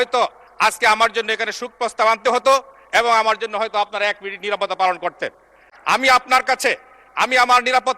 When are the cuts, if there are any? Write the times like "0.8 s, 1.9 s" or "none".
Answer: 5.7 s